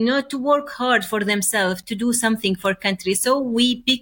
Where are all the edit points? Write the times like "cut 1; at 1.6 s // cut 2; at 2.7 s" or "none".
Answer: none